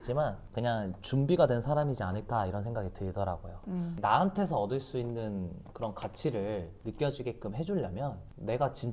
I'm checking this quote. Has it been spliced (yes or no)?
yes